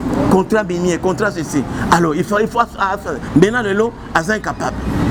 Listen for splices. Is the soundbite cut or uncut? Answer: uncut